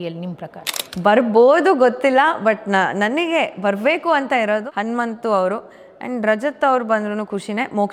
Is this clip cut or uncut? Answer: uncut